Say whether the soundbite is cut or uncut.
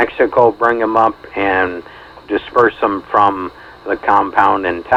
uncut